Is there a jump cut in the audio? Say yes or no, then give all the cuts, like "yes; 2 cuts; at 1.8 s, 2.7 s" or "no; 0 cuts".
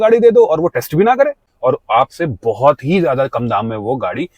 yes; 1 cut; at 1.4 s